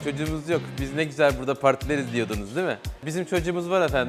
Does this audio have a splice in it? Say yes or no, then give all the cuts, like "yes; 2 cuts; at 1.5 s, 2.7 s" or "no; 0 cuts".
no; 0 cuts